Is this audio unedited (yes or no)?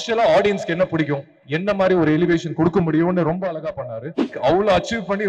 no